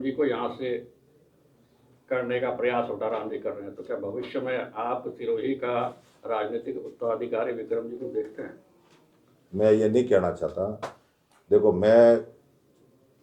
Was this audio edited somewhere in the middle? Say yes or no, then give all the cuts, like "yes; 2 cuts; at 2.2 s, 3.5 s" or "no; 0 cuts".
no; 0 cuts